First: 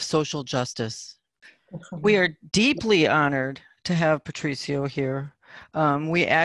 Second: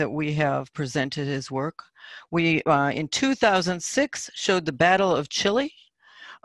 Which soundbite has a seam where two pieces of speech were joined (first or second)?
first